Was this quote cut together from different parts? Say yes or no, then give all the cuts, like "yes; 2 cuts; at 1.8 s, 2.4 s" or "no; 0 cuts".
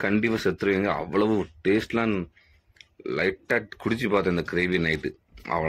no; 0 cuts